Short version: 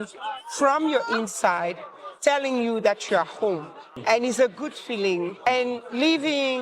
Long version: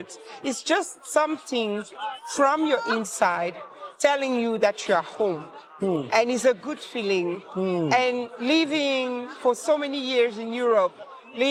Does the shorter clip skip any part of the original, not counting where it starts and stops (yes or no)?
yes